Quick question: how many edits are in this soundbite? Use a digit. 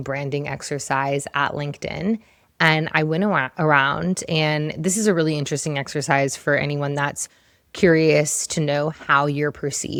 0